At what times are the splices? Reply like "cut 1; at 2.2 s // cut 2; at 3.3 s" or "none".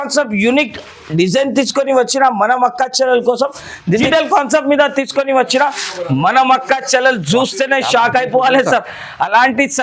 cut 1; at 4.1 s